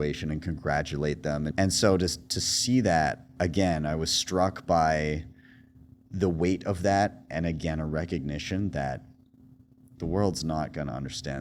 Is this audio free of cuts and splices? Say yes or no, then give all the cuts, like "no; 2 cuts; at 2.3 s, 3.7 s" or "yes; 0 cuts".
no; 1 cut; at 1.5 s